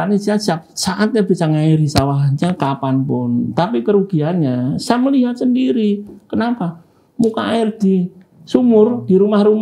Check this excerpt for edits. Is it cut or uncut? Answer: uncut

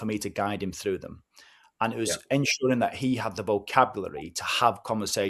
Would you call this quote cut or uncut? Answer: uncut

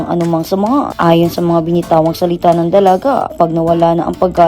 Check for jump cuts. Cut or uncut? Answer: cut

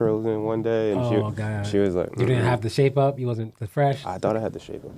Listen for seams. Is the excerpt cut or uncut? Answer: uncut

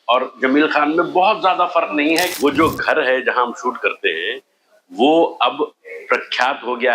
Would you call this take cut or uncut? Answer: cut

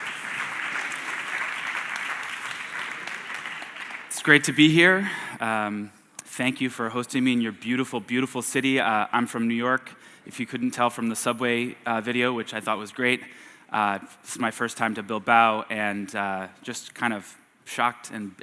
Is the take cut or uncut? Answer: uncut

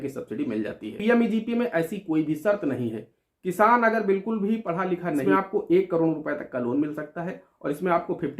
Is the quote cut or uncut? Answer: cut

